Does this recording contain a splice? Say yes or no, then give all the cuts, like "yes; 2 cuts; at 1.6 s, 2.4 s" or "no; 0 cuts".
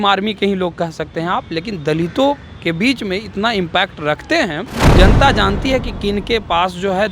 yes; 1 cut; at 4.8 s